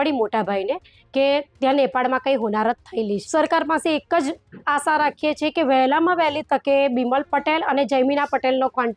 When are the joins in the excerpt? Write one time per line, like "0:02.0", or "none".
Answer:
0:03.2